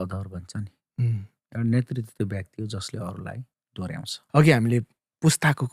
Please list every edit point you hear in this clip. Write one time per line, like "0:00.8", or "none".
0:04.1